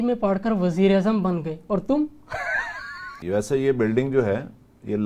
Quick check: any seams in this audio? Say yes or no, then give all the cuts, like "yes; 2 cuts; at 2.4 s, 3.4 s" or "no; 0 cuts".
yes; 1 cut; at 3.1 s